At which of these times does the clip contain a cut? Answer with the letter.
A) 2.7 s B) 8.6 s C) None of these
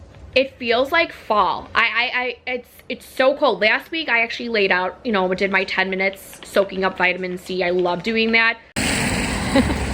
B